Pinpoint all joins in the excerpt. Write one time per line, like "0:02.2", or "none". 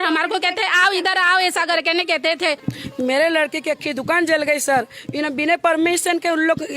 0:02.6